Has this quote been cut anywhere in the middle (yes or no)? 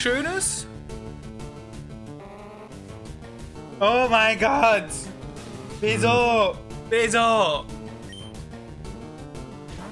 no